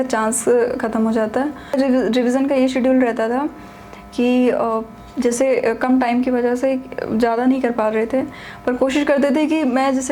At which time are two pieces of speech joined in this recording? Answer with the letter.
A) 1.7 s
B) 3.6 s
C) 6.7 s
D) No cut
A